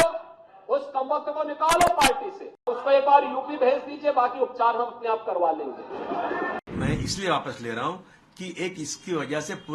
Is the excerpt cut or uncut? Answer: cut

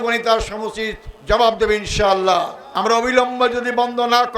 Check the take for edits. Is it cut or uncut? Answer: cut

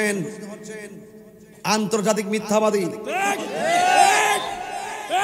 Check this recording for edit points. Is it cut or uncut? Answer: uncut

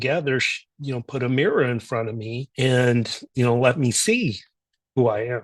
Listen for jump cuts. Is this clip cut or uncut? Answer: uncut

